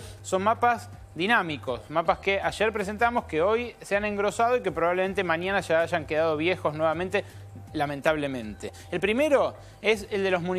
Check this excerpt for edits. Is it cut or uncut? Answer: uncut